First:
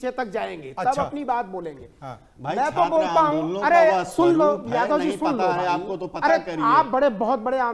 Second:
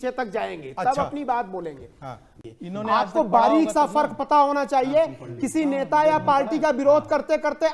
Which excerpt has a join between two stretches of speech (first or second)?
second